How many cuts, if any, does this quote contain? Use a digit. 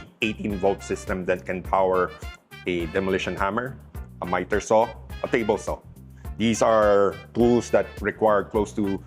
0